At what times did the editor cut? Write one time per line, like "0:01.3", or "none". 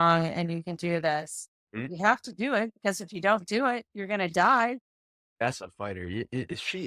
0:01.9
0:05.3